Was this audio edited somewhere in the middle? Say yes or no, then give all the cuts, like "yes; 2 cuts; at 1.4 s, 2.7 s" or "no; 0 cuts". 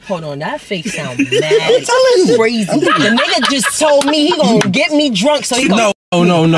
yes; 1 cut; at 2.9 s